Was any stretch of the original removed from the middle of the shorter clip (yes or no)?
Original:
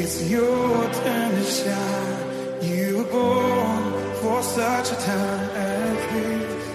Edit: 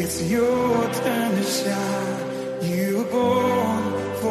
no